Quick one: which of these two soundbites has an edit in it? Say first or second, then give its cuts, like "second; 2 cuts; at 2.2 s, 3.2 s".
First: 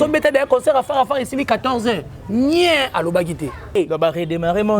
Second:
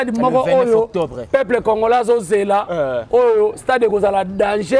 first; 1 cut; at 3.8 s